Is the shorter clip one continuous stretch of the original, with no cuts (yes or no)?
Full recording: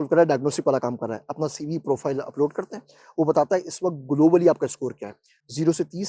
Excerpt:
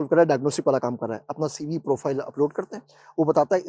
yes